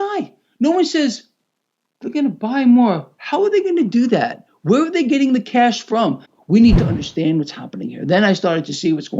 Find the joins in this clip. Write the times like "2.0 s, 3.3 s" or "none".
6.3 s